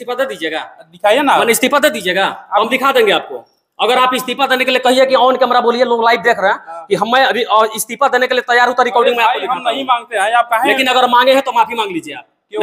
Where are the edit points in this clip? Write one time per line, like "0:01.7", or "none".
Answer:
none